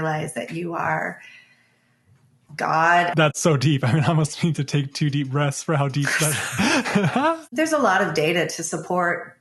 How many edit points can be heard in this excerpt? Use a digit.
2